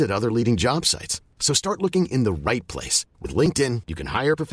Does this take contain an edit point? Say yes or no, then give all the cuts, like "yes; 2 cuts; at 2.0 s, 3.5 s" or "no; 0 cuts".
no; 0 cuts